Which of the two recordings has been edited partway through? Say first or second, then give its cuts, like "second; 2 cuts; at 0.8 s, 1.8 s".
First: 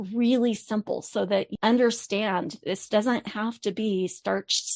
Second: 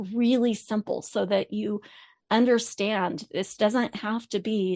first; 1 cut; at 1.5 s